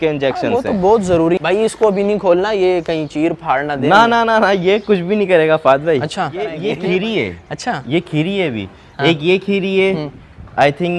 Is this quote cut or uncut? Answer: cut